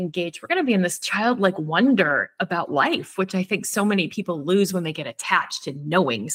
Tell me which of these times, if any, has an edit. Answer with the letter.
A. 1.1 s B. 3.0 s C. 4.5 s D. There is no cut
D